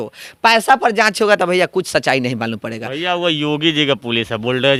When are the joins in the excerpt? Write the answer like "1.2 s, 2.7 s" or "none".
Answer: none